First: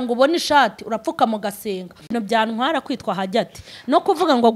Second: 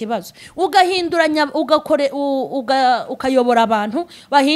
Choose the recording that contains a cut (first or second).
first